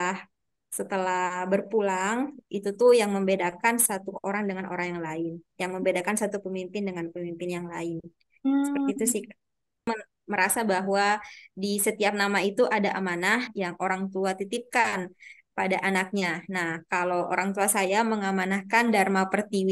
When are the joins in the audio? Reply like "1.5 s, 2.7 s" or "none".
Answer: 9.9 s